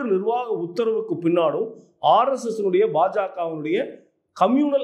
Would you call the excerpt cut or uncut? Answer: uncut